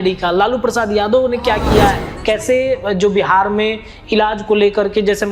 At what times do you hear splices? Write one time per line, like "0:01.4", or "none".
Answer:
0:02.1